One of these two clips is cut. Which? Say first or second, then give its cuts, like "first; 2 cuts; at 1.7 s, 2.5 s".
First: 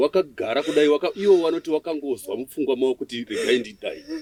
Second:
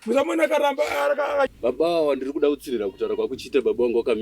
second; 1 cut; at 1.5 s